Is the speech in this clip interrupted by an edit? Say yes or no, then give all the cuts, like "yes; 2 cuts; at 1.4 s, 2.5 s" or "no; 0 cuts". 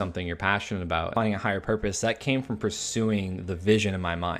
yes; 1 cut; at 1.1 s